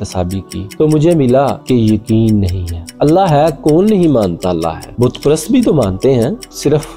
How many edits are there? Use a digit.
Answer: 1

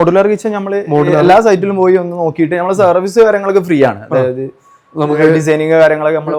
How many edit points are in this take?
0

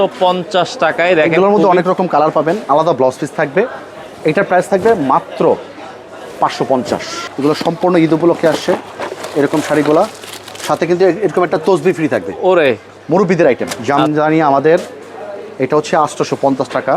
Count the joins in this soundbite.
3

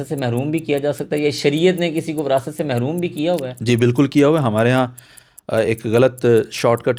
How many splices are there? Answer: 0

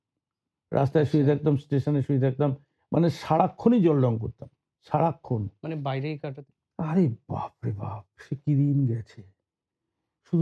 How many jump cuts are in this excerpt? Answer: 1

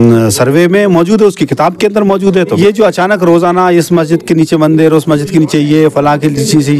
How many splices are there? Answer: 1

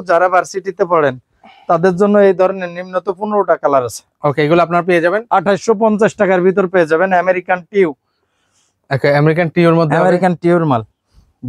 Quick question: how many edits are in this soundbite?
0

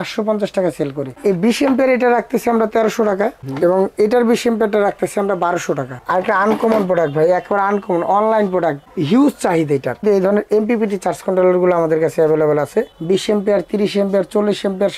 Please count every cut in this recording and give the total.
3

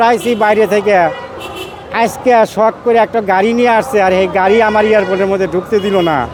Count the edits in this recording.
0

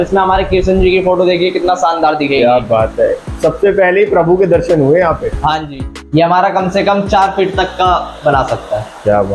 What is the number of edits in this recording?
1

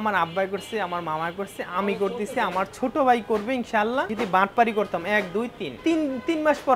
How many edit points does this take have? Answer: 2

